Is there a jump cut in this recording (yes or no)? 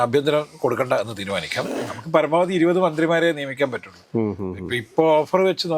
yes